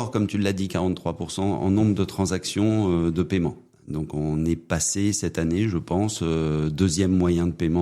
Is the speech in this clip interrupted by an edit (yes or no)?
yes